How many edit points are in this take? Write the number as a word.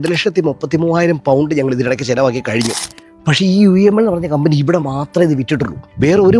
one